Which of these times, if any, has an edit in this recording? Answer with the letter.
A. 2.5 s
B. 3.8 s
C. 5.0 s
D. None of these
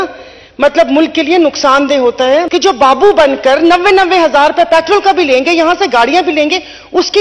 A